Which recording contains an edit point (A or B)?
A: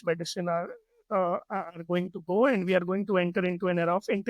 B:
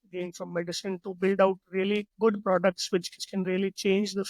B